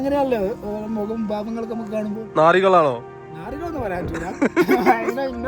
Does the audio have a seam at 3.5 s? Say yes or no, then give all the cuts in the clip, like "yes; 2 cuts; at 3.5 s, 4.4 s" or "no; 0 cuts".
no; 0 cuts